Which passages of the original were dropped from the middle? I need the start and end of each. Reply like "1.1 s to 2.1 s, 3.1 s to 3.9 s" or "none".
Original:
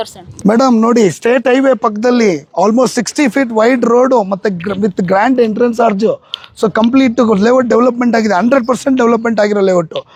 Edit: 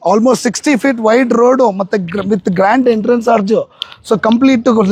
none